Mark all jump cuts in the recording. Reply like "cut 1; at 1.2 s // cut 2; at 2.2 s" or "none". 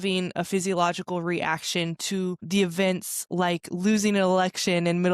none